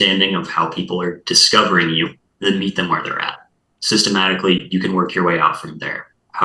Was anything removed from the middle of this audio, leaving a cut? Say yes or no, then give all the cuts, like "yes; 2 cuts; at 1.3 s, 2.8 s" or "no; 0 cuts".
yes; 1 cut; at 2.2 s